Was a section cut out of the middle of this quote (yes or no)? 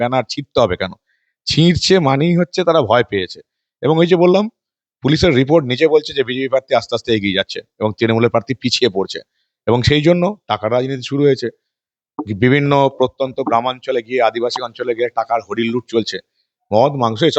no